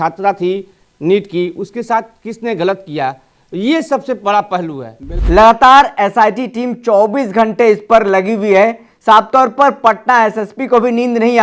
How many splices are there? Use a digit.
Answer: 1